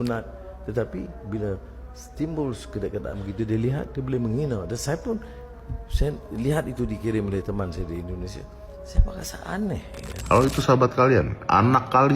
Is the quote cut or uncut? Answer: cut